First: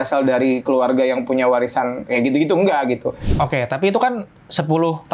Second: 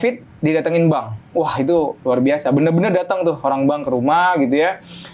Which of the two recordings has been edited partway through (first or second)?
first